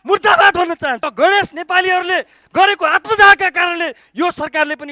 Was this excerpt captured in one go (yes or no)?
no